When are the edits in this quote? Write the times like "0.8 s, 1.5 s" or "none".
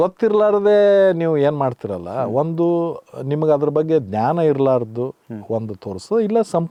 none